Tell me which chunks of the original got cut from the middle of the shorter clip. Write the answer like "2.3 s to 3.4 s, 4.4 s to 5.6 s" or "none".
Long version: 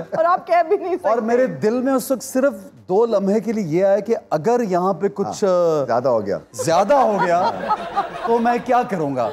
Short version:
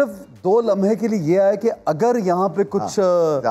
none